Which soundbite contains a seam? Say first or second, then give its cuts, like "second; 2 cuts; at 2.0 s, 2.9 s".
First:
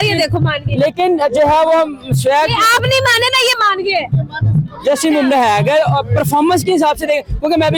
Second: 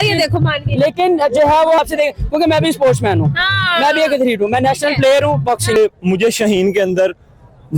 second; 2 cuts; at 1.8 s, 5.8 s